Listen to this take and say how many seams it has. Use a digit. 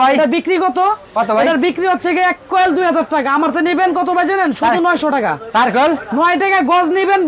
0